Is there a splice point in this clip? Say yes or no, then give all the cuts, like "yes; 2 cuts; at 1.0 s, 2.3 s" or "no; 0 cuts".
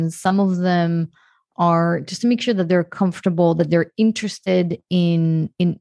no; 0 cuts